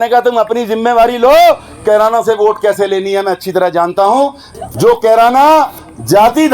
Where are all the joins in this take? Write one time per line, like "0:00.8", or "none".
0:04.4